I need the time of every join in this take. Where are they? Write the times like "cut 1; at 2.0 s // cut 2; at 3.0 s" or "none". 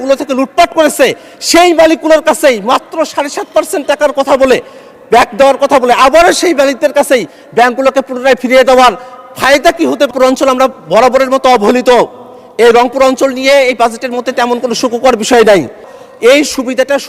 cut 1; at 10.1 s // cut 2; at 15.9 s